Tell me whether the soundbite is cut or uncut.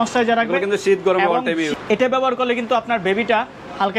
cut